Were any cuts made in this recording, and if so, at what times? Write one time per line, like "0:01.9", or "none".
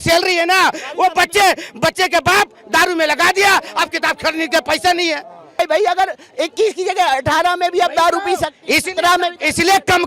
none